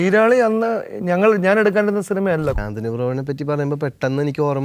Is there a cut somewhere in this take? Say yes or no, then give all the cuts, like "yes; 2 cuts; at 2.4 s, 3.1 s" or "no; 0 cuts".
yes; 1 cut; at 2.6 s